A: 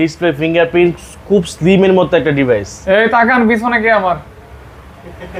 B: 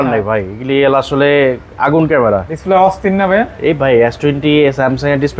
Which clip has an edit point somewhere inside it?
B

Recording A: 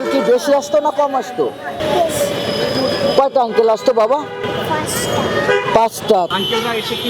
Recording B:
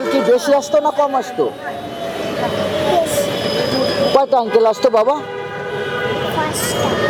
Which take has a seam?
A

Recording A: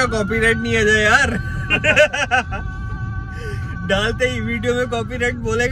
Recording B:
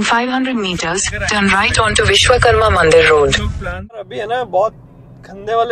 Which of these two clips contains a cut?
B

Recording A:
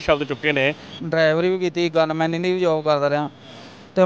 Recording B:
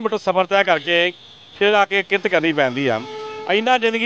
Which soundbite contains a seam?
A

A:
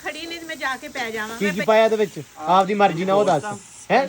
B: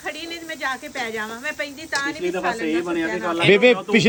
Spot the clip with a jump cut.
A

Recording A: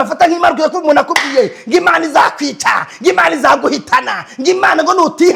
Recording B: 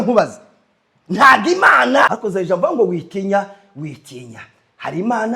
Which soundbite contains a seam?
B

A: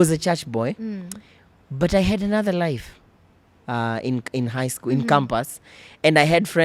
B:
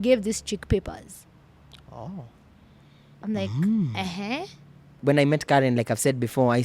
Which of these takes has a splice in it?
B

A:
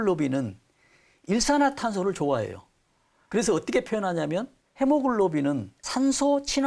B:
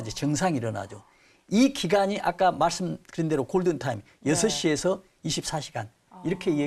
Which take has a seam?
A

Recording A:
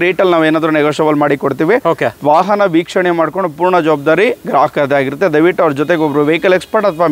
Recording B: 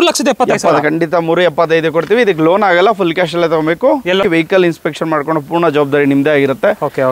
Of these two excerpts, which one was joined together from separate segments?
B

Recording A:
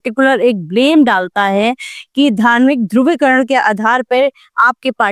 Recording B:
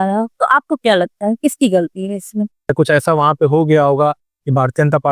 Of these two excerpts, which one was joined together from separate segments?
B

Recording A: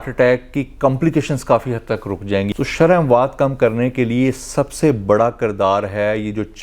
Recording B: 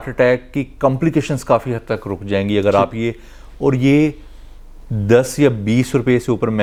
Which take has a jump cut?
A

